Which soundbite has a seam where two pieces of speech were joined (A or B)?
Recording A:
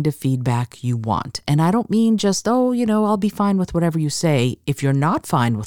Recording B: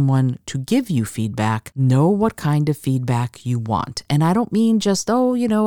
B